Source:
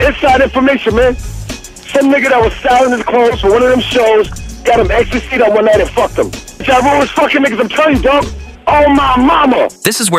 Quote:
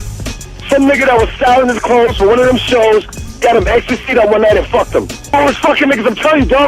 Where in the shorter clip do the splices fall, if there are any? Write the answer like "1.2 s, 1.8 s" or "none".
5.3 s